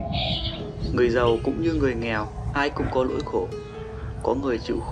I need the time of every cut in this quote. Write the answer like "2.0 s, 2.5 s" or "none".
0.9 s